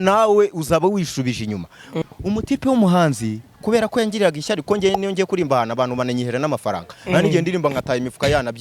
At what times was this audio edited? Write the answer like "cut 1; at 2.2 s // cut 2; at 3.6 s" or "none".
cut 1; at 1.8 s

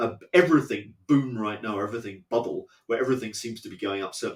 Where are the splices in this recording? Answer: none

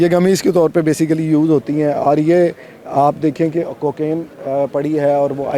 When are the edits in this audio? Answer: none

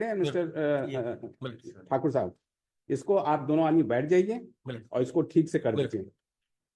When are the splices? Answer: none

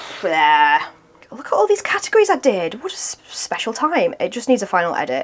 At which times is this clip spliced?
cut 1; at 1.2 s

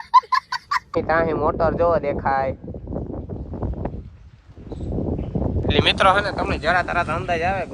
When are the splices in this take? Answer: cut 1; at 0.9 s

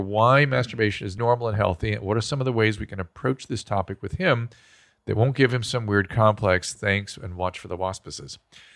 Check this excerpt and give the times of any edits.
cut 1; at 1.2 s

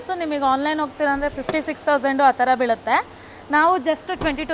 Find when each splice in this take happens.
none

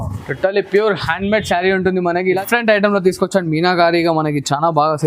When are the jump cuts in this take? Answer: cut 1; at 2.4 s

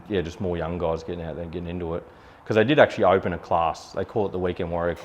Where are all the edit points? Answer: none

